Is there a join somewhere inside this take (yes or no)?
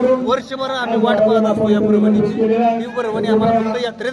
no